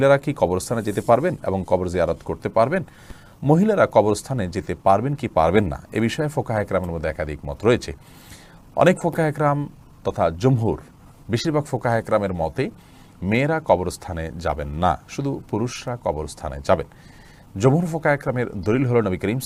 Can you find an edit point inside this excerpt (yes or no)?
no